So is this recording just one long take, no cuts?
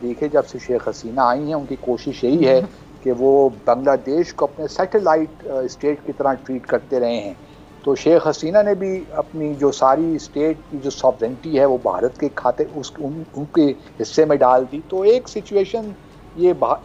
yes; 0 cuts

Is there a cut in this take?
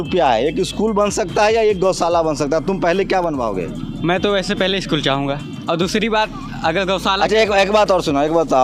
no; 0 cuts

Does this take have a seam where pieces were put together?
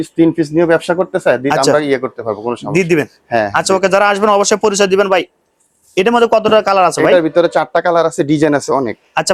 no; 0 cuts

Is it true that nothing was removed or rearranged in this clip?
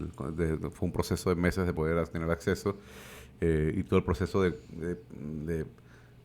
yes; 0 cuts

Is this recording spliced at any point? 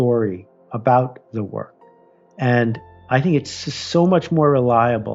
no; 0 cuts

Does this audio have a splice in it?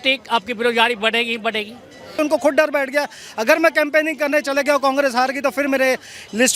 yes; 1 cut; at 2.2 s

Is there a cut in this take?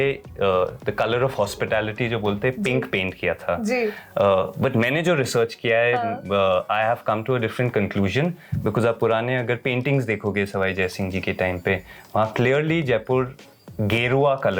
no; 0 cuts

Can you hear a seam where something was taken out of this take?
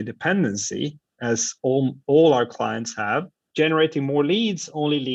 no; 0 cuts

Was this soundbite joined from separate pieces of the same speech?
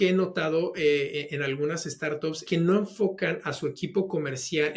yes; 1 cut; at 2.4 s

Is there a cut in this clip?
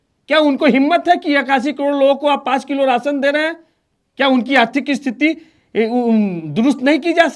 no; 0 cuts

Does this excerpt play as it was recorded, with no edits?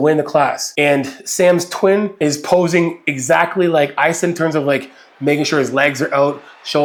yes; 0 cuts

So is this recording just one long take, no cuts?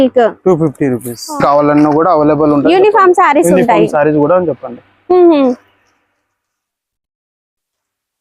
no; 1 cut; at 1.1 s

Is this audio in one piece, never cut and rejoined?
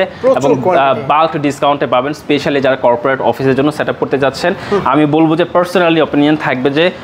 yes; 0 cuts

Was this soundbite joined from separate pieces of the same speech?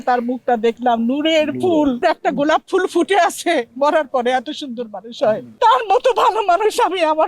yes; 2 cuts; at 2.0 s, 5.5 s

